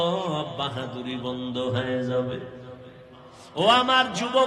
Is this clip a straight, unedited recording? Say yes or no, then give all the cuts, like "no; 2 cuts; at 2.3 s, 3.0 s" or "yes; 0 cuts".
no; 1 cut; at 3.4 s